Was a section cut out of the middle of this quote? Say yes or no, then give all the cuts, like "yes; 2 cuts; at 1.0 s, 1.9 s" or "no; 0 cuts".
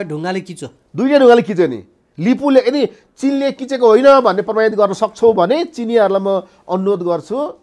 no; 0 cuts